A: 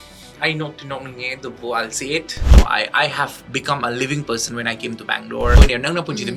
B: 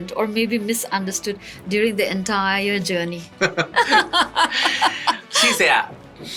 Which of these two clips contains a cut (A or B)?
A